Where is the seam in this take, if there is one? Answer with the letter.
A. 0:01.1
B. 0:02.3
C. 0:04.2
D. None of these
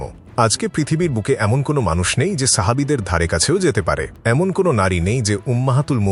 D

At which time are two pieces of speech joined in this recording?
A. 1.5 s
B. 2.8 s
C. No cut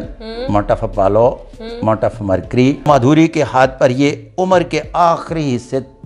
B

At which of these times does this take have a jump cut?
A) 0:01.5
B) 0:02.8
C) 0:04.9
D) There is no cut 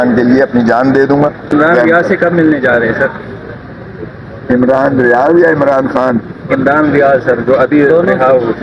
A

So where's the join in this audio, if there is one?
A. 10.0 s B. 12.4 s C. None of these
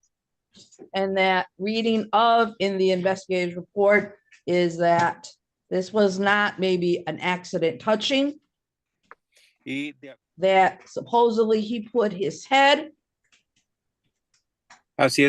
A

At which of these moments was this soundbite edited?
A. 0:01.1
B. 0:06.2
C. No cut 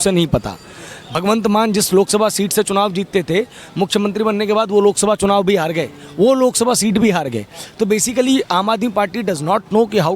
A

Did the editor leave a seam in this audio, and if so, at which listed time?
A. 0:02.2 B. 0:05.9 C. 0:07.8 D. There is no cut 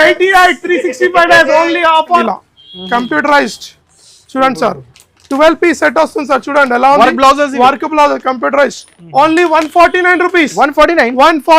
A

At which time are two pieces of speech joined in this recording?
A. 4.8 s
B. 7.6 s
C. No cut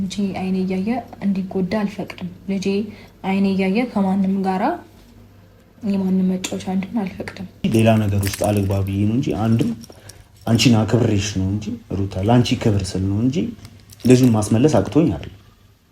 B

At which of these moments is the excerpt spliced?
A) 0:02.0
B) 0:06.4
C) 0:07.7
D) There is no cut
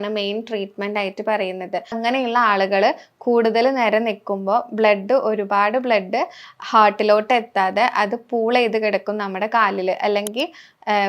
A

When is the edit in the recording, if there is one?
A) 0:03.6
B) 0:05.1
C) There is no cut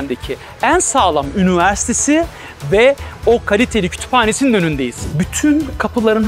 B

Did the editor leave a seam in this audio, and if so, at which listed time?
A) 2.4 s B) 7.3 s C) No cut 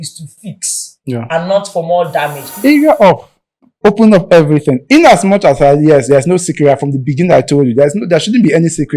A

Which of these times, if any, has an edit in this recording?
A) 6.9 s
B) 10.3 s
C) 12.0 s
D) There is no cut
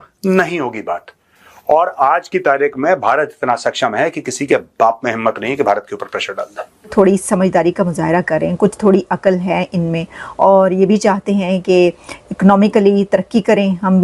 A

